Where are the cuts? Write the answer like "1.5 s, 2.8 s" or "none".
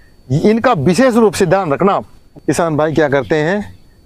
2.2 s